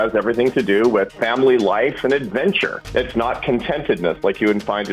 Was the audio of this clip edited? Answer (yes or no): yes